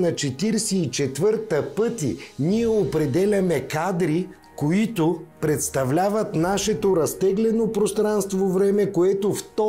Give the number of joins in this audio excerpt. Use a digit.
2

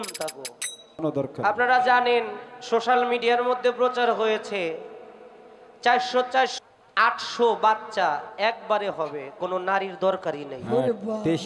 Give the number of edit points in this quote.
2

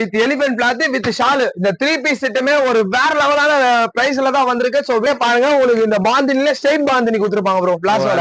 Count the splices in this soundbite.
1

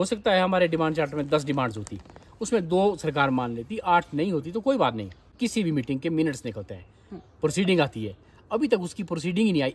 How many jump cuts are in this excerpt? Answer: 1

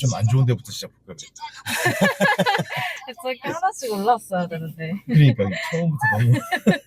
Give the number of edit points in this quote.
0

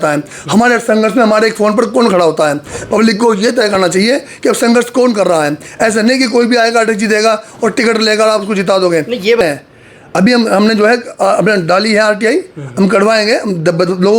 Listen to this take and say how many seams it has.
1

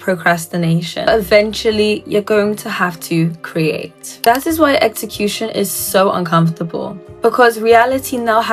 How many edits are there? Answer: 2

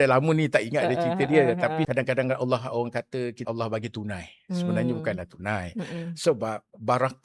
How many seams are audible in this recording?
2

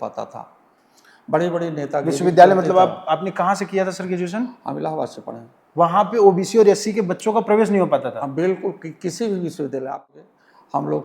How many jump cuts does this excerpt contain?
1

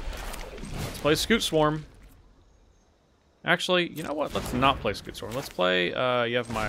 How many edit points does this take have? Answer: 0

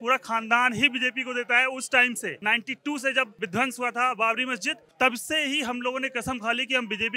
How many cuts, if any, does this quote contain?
3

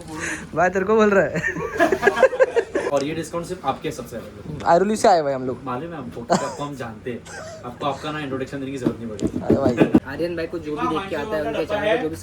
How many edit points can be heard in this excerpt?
2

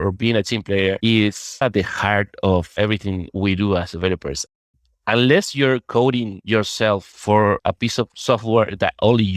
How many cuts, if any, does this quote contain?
2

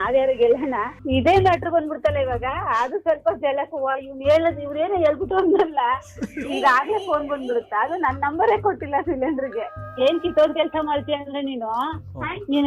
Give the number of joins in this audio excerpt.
1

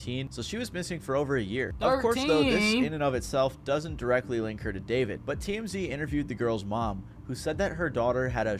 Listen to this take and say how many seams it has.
0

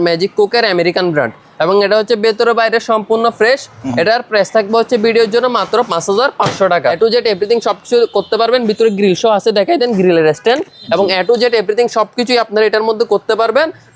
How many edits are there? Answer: 2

